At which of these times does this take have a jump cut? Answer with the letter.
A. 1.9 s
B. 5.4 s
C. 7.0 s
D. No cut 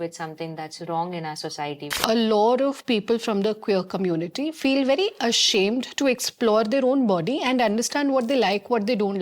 A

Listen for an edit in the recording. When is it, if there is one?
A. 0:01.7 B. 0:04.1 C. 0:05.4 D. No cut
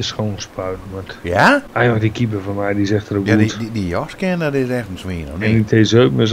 A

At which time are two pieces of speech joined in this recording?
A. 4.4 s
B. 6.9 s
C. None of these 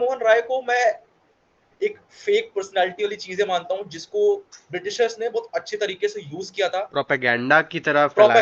C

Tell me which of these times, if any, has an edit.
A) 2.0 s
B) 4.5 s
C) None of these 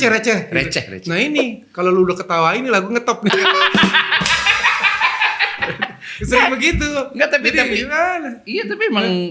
C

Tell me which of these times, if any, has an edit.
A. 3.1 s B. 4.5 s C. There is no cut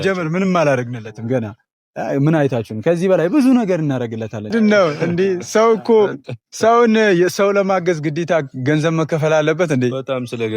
B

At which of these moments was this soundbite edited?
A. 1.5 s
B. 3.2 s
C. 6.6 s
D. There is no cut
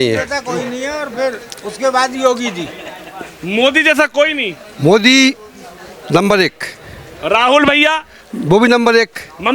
D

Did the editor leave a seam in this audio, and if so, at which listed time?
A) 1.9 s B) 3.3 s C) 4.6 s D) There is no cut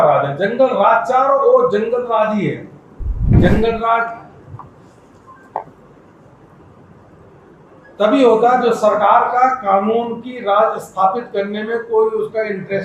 B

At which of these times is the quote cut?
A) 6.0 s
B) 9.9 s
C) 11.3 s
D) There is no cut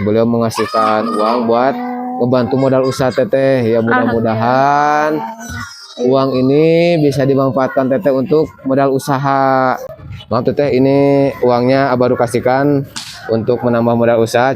B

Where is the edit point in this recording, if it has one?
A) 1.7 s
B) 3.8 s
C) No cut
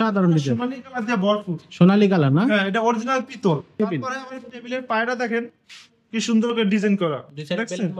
B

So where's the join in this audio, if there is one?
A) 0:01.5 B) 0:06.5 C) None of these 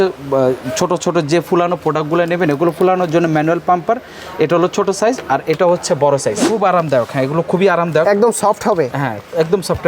B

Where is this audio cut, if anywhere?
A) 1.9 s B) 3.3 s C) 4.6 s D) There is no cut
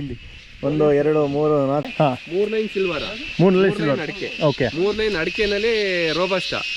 A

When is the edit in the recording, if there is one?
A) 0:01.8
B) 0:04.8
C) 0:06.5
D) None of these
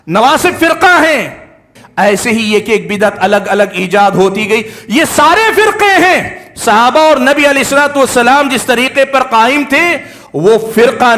A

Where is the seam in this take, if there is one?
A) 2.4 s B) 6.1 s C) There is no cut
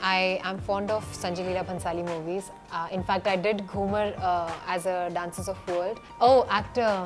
B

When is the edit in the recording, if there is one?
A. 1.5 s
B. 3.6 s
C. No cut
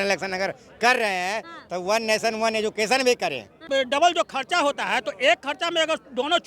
B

